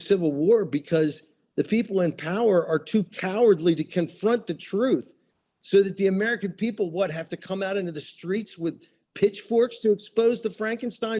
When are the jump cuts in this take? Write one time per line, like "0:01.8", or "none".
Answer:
none